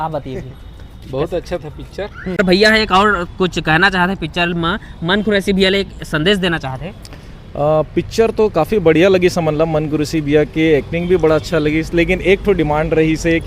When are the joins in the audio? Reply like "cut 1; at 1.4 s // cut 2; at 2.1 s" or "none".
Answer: cut 1; at 2.3 s